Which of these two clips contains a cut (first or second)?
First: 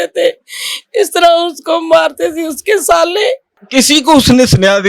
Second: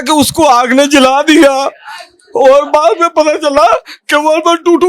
first